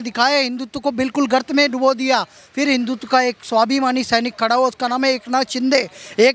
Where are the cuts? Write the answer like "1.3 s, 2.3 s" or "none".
none